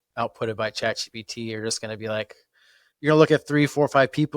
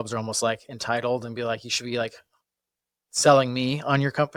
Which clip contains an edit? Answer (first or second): first